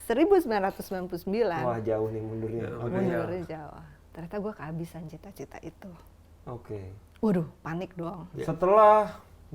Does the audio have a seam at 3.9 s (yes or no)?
no